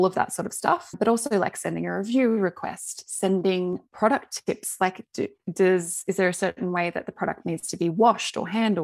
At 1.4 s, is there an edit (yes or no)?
no